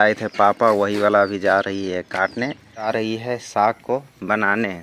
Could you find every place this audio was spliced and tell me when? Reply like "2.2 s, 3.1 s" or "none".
2.9 s